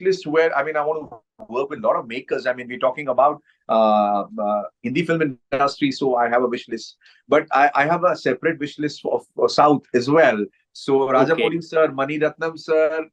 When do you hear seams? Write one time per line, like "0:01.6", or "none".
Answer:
none